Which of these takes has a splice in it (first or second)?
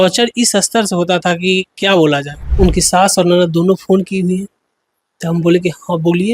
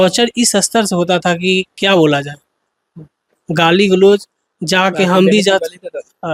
first